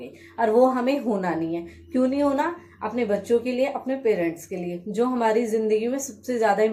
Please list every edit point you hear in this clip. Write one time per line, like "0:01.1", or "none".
none